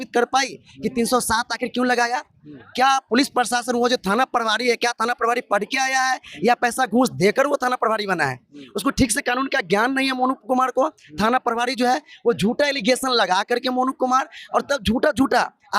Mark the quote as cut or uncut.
uncut